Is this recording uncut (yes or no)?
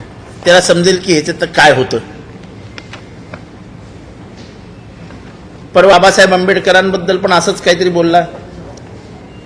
no